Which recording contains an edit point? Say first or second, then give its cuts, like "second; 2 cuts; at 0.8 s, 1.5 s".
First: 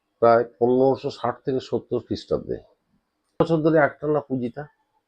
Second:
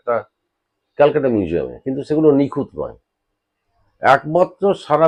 first; 1 cut; at 3.4 s